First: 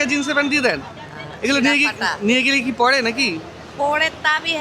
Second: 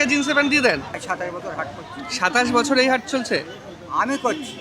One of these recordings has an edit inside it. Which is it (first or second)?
second